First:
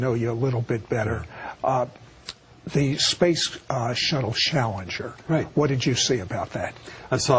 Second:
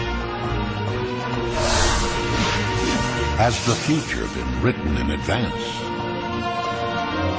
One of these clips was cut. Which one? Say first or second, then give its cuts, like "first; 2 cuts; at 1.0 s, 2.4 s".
first; 1 cut; at 3.5 s